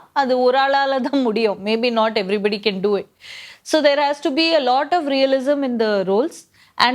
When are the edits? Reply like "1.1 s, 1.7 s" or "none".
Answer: none